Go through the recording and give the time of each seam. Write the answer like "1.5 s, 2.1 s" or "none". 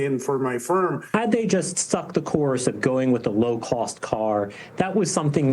1.0 s